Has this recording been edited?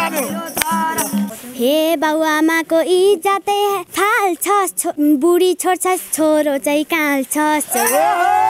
yes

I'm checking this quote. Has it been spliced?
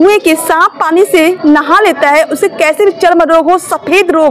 no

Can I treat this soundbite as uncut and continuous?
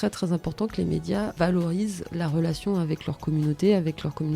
no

